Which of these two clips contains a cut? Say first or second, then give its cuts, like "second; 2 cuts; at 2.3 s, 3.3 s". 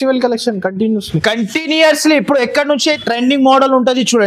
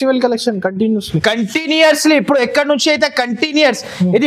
first; 1 cut; at 3.0 s